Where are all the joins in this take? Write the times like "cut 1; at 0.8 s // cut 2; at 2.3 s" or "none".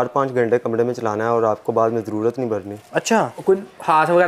cut 1; at 3.3 s